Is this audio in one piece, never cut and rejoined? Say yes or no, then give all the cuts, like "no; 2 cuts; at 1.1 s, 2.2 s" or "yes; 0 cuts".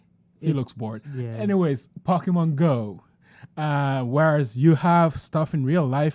no; 1 cut; at 1.1 s